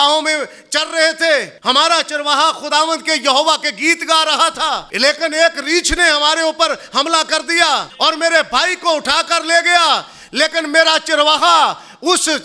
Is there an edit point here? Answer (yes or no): yes